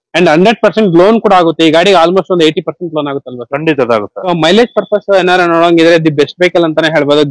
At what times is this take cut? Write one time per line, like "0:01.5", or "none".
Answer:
0:04.3